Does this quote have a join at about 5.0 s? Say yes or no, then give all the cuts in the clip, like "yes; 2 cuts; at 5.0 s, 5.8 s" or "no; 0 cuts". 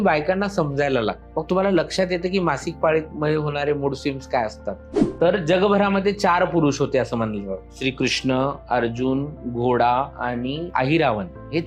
yes; 1 cut; at 5.0 s